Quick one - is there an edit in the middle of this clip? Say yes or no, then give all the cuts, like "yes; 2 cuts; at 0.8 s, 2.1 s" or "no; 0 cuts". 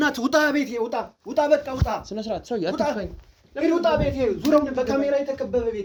no; 0 cuts